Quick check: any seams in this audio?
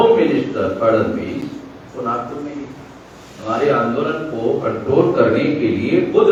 no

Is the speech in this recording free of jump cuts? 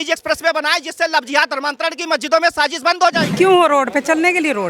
no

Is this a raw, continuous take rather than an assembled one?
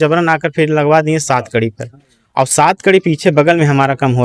yes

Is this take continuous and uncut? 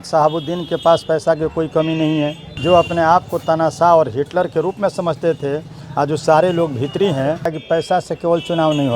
no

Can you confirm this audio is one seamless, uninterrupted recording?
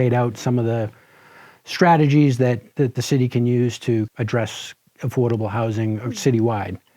no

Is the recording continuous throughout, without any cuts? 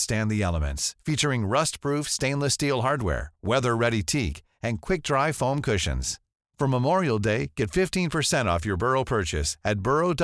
yes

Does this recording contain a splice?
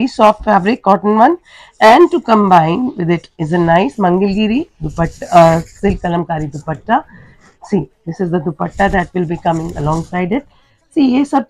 no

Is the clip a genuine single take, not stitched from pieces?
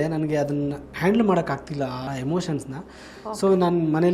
no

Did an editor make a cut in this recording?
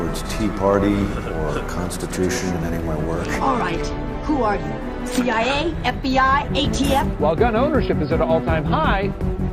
yes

